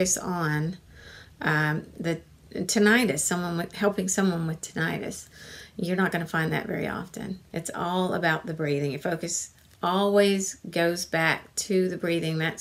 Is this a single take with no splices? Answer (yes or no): no